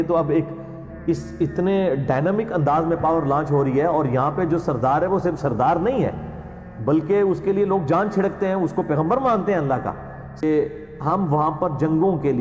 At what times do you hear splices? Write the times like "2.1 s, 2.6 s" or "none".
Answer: 10.4 s